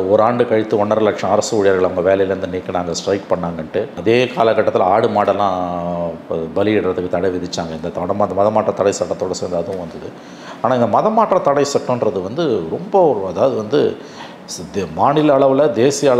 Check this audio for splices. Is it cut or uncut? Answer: uncut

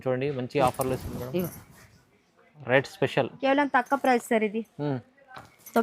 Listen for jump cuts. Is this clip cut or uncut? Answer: cut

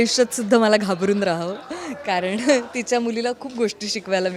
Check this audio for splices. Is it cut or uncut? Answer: uncut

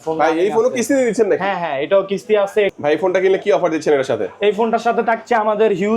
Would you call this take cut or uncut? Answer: cut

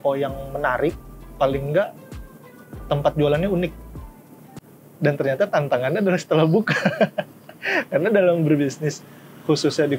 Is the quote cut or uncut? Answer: cut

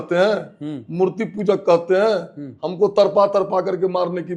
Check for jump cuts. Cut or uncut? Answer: uncut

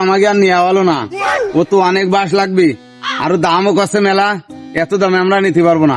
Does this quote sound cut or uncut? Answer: uncut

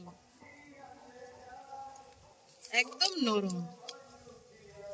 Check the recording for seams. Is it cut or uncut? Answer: uncut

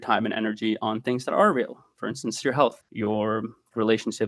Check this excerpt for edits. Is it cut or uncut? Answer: cut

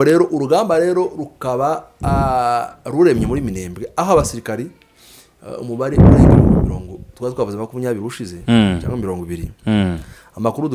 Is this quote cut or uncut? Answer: uncut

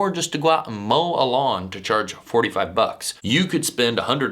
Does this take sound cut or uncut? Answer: cut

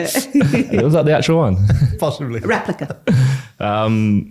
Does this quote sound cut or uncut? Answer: uncut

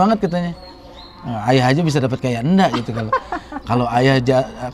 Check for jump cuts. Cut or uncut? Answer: uncut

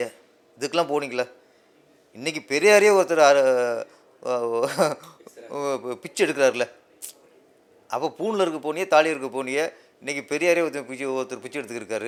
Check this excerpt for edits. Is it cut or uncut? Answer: uncut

